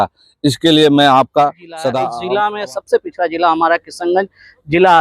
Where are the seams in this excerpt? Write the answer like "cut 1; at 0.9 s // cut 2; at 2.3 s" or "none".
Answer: cut 1; at 2.2 s

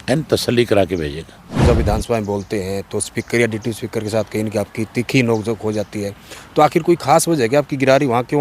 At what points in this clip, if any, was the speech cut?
cut 1; at 1.6 s

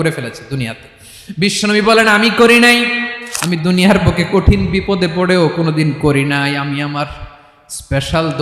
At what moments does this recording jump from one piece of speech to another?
cut 1; at 3.1 s

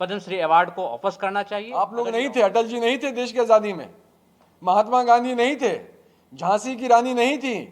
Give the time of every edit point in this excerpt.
cut 1; at 1.6 s

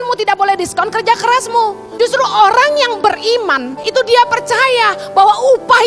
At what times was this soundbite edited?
cut 1; at 1.8 s // cut 2; at 3.7 s

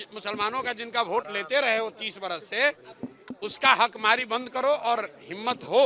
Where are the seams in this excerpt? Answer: none

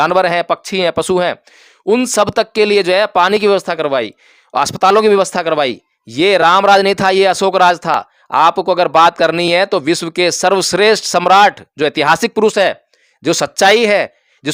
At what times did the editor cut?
none

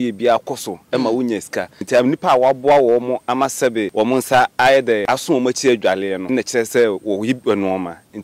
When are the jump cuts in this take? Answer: cut 1; at 1.8 s // cut 2; at 3.9 s // cut 3; at 5.0 s // cut 4; at 6.2 s

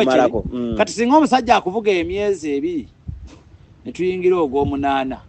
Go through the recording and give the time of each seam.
none

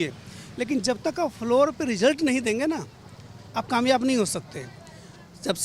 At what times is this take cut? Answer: none

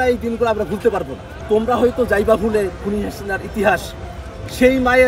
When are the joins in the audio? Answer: cut 1; at 1.3 s

